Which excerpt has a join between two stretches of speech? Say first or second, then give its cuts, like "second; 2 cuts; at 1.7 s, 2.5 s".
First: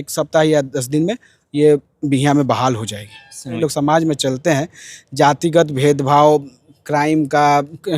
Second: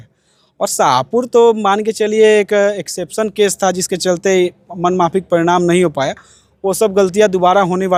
first; 1 cut; at 3.6 s